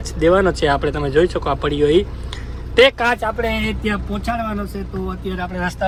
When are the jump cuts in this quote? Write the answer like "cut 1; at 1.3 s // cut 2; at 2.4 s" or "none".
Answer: none